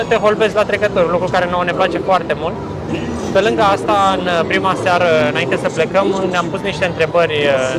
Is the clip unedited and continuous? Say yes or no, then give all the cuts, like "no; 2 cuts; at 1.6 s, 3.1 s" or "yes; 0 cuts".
yes; 0 cuts